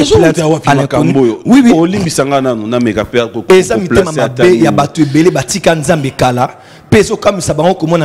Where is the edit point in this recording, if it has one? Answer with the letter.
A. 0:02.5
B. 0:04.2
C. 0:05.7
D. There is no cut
D